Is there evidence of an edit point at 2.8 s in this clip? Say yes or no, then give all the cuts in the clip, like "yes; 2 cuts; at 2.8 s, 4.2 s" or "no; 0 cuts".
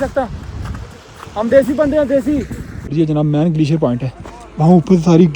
yes; 1 cut; at 2.8 s